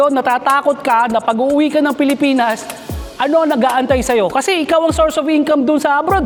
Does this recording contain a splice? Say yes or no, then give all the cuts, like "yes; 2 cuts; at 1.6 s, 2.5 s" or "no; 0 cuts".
no; 0 cuts